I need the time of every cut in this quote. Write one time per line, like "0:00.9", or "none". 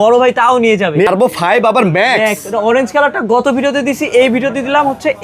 0:01.1